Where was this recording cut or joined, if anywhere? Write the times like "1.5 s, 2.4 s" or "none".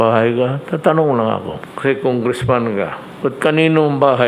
1.6 s, 3.0 s

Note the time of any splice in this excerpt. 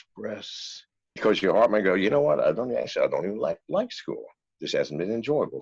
1.1 s

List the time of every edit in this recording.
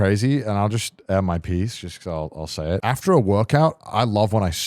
2.8 s

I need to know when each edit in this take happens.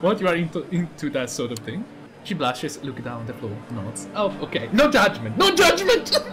2.1 s

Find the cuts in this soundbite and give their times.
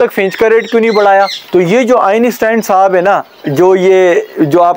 1.4 s

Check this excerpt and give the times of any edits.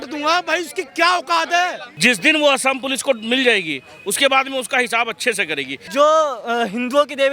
1.9 s, 5.8 s

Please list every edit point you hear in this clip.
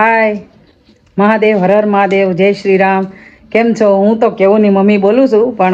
none

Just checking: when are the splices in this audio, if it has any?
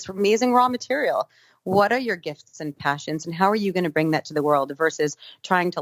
none

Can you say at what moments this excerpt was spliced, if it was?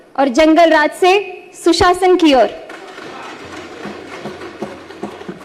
none

